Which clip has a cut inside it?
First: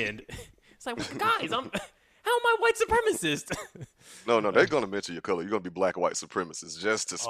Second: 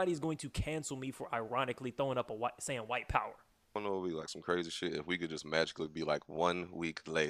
second; 1 cut; at 3.8 s

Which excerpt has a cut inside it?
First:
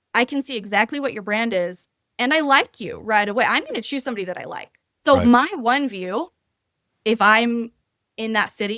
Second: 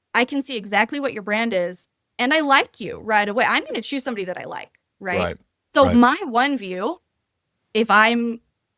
first; 1 cut; at 4.8 s

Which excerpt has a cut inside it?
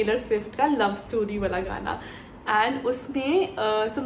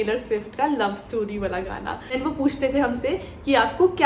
second; 1 cut; at 2.0 s

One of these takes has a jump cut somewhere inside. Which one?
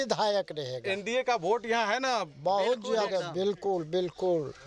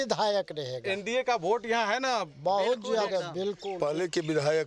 second; 1 cut; at 3.6 s

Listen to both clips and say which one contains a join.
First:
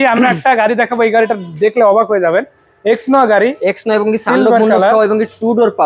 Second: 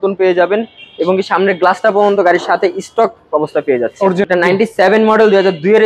second; 1 cut; at 4.2 s

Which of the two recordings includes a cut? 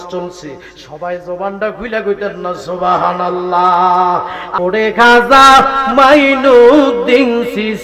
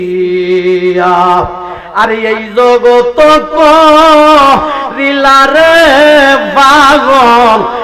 first; 1 cut; at 4.4 s

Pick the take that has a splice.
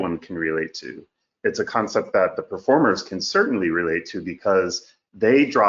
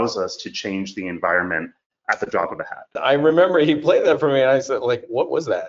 second; 1 cut; at 3.0 s

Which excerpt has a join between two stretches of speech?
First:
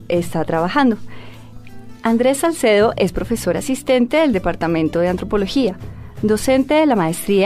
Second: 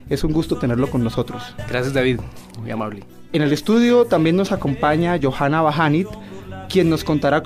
first; 1 cut; at 3.0 s

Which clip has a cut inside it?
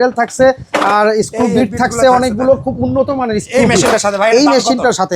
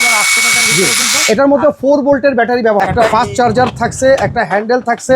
second; 1 cut; at 2.8 s

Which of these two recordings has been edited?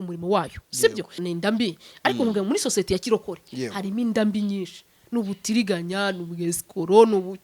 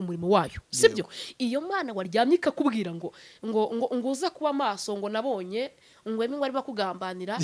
first; 1 cut; at 1.1 s

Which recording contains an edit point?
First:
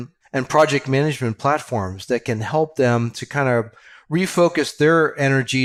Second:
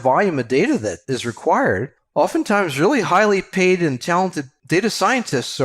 second; 3 cuts; at 1.0 s, 2.0 s, 4.5 s

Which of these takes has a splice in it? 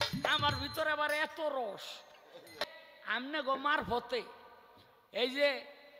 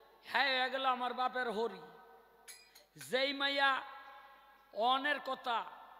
first; 1 cut; at 2.7 s

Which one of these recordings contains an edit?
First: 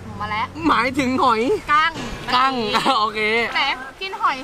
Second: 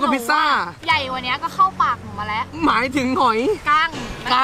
first; 1 cut; at 3.5 s

